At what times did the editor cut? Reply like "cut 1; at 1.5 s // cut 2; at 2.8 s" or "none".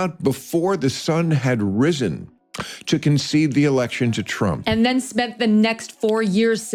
none